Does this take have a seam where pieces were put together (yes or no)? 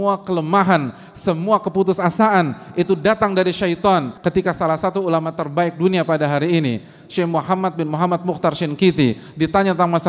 yes